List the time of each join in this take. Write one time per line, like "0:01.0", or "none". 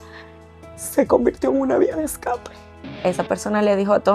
0:02.9